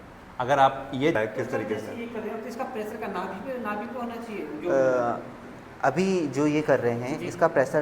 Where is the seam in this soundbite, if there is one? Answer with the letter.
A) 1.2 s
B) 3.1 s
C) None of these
A